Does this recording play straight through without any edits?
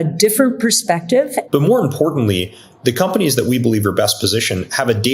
no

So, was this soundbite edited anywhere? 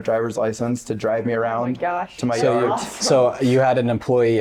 no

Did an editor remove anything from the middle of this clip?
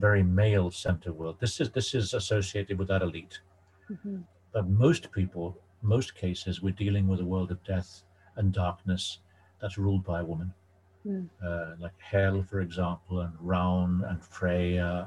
no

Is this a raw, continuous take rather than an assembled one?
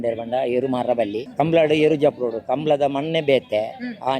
no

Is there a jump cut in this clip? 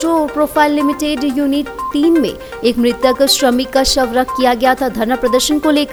no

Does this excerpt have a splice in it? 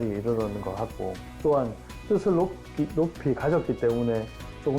yes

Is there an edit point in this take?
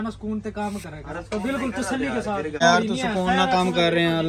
yes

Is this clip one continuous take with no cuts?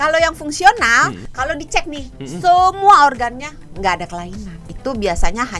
no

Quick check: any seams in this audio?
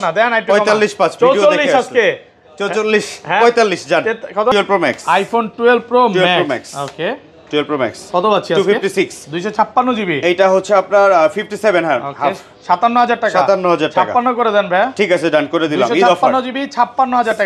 no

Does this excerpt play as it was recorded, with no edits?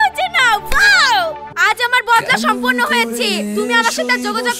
no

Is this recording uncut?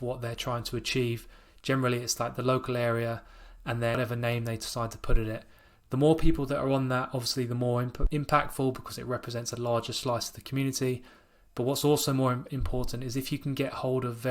no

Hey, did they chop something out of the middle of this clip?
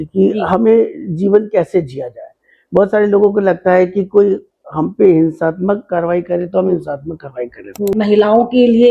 yes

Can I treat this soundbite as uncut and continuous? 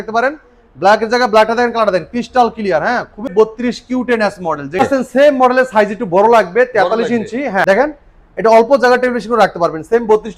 no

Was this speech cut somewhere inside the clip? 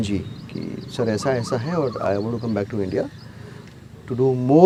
no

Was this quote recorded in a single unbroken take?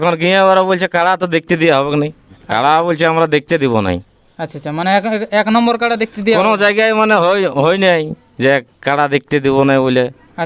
no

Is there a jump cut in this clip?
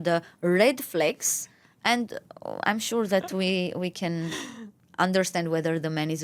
no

